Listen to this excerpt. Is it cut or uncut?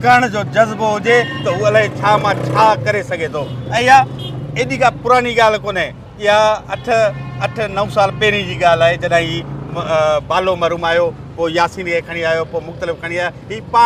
uncut